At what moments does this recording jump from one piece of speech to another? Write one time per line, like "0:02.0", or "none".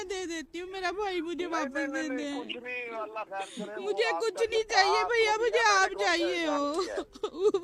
none

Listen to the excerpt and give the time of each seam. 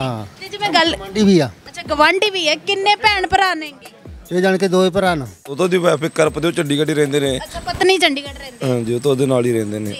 0:05.6

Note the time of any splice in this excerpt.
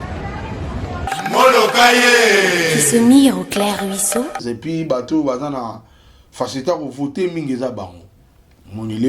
0:04.4

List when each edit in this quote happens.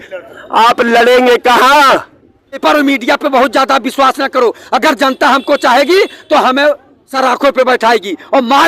0:02.6

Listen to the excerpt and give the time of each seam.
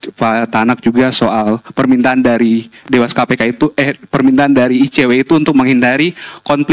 none

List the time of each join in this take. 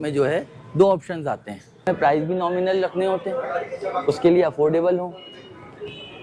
0:01.9

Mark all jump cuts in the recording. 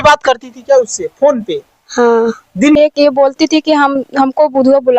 0:02.8

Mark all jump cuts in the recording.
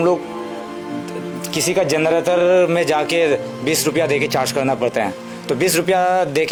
none

